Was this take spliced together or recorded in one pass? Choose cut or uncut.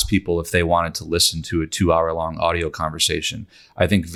uncut